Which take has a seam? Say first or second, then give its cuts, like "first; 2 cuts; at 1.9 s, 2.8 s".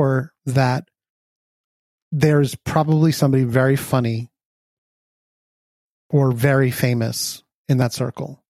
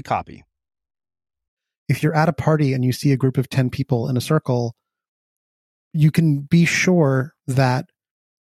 second; 2 cuts; at 1.6 s, 5.8 s